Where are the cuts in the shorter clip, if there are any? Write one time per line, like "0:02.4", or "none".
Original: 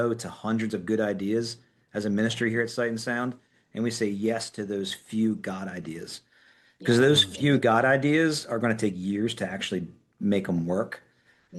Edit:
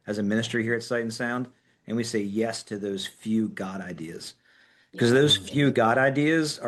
none